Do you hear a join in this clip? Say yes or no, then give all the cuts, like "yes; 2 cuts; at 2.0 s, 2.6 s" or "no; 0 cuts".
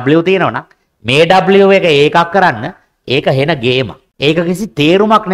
yes; 1 cut; at 4.0 s